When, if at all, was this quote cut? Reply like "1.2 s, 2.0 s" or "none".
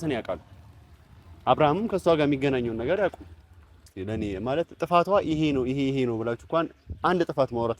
3.9 s